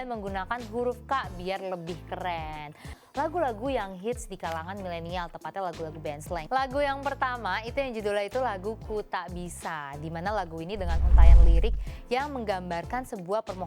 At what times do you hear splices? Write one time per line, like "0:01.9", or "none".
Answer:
0:02.9